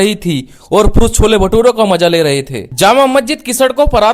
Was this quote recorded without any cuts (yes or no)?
no